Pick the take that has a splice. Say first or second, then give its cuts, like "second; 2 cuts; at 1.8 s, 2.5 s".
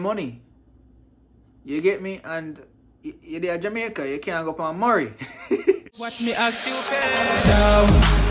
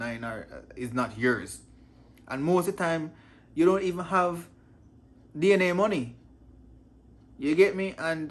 first; 1 cut; at 6.0 s